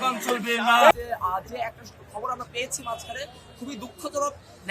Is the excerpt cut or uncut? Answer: cut